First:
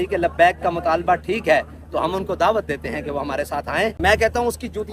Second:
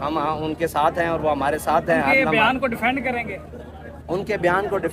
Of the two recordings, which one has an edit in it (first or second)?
first